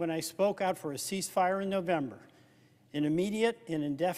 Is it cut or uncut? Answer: cut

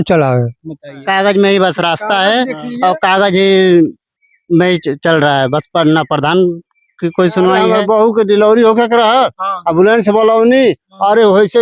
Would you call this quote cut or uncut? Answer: cut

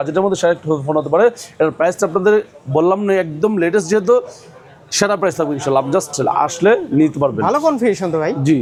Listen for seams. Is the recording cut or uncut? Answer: uncut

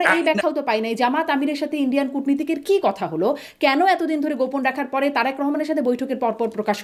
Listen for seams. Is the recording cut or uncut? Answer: uncut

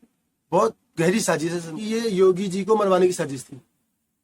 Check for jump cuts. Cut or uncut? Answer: cut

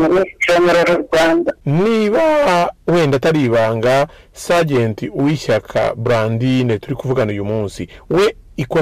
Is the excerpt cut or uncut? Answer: cut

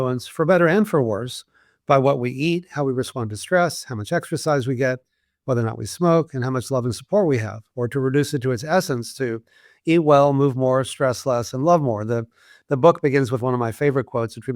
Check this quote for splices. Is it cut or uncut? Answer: uncut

